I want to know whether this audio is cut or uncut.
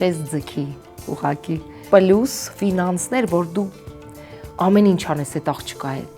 cut